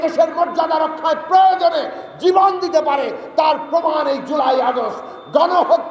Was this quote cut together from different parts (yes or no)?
no